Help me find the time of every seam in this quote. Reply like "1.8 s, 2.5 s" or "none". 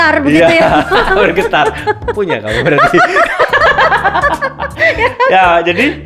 none